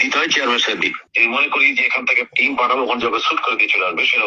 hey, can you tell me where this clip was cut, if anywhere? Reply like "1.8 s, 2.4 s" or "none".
1.1 s